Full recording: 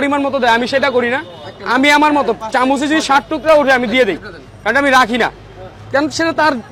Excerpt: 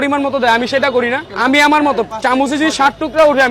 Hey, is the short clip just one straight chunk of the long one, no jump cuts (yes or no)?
no